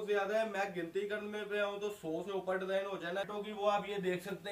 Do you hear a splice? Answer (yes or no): yes